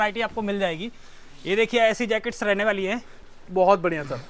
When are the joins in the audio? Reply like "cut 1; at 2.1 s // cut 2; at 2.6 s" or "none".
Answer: none